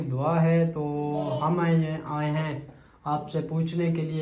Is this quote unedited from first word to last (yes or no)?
yes